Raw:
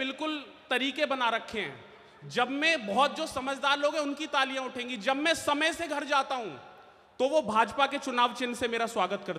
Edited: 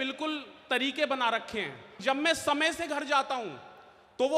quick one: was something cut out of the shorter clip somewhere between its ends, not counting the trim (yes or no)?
yes